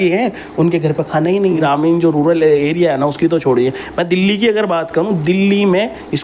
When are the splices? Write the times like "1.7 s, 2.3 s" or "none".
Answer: 1.6 s